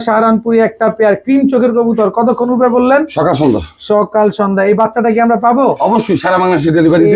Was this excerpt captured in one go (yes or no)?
yes